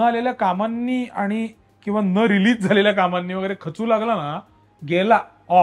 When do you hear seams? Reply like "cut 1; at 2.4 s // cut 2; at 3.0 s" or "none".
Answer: none